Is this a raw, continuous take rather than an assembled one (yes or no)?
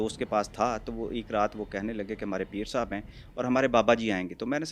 yes